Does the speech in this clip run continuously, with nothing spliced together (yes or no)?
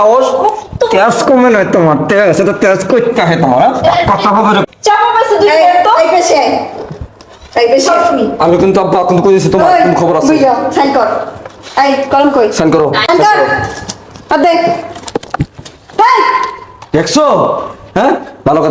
no